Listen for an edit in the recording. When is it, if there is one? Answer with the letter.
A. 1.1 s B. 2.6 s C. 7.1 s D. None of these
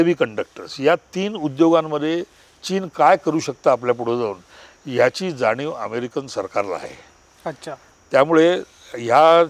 D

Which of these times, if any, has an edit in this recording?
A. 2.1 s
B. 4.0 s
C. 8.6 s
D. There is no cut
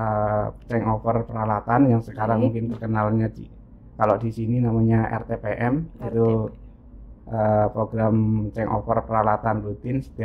D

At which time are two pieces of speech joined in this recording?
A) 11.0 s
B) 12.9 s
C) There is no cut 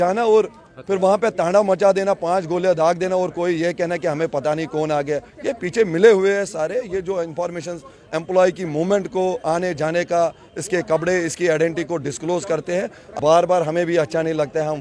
C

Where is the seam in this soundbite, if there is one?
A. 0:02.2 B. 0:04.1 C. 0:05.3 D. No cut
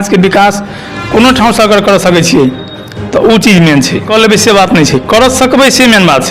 B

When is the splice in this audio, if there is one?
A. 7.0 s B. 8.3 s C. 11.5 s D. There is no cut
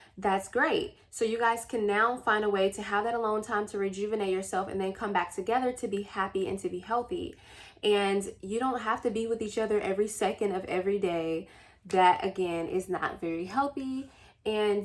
D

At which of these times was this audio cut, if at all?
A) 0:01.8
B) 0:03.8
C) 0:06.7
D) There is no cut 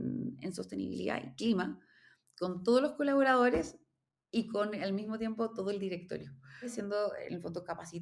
C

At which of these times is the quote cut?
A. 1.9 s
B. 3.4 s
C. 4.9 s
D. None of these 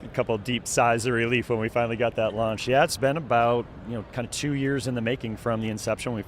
D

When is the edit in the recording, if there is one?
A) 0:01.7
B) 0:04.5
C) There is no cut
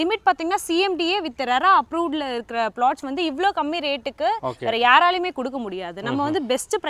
C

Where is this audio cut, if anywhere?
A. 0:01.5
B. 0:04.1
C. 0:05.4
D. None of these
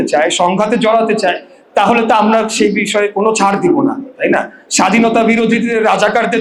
D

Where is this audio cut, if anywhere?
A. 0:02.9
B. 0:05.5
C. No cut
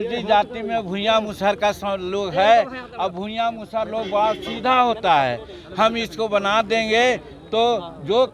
C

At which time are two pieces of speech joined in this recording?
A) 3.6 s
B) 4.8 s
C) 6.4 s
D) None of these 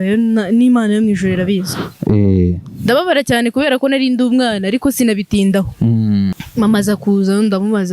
C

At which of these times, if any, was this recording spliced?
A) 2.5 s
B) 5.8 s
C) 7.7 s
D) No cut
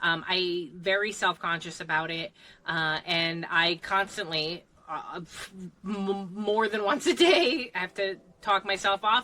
C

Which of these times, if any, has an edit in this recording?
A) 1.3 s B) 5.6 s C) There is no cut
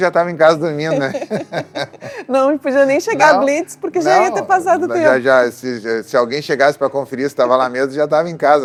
C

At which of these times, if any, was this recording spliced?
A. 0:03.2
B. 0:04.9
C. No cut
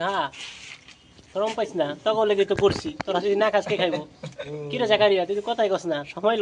B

